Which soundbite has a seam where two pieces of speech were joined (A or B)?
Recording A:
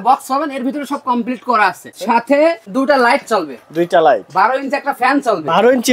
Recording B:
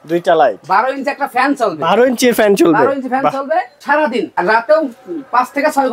B